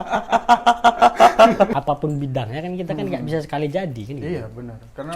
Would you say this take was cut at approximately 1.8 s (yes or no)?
yes